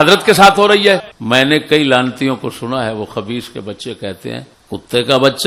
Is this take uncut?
no; 1 cut; at 1.1 s

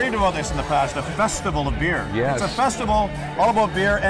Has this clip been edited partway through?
no; 0 cuts

